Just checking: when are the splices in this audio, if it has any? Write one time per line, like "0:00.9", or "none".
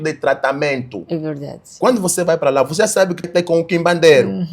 0:03.3